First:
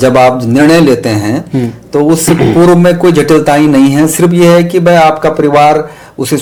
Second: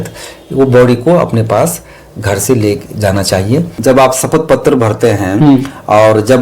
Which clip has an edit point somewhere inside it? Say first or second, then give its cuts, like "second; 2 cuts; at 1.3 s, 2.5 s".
second; 1 cut; at 3.7 s